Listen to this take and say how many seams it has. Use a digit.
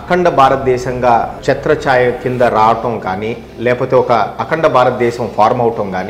1